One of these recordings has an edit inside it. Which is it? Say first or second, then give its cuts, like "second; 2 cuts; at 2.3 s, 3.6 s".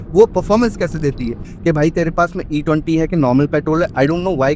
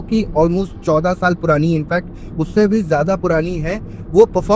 first; 1 cut; at 1.5 s